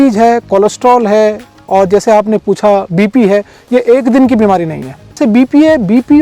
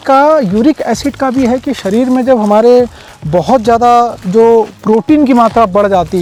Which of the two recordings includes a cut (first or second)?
first